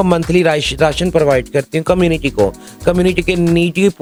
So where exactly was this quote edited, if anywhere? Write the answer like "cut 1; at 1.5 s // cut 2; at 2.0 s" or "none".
none